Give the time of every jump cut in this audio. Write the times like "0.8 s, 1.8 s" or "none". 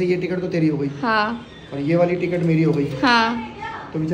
none